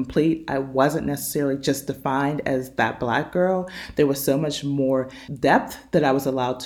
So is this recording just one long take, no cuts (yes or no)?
yes